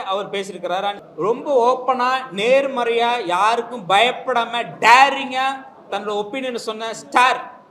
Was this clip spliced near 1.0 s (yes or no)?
yes